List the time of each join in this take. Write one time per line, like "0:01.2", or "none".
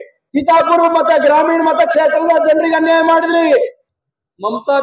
0:03.8